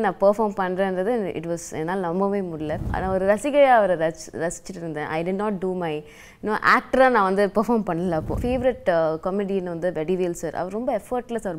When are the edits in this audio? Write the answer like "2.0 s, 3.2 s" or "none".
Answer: 2.9 s, 8.4 s

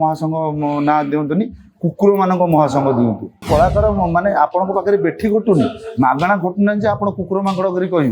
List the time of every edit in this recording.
3.5 s

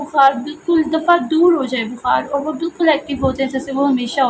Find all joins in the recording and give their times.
none

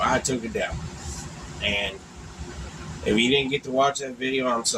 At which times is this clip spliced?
none

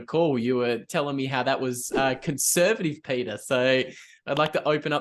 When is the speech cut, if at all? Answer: none

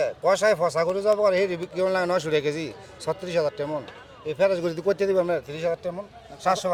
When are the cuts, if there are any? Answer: none

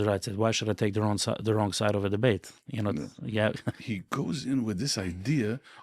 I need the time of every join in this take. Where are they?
3.8 s

